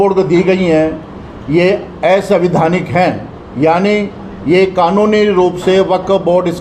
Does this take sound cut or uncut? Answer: uncut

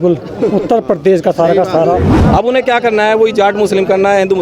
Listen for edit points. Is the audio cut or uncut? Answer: cut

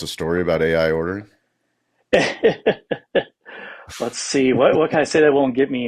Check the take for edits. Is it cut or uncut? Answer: uncut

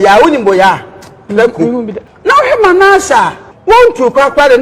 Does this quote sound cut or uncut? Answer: cut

